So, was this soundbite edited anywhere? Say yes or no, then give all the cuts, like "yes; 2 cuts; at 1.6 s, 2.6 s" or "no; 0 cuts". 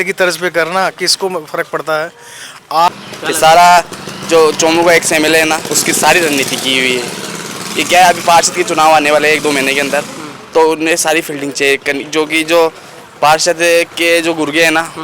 yes; 1 cut; at 2.9 s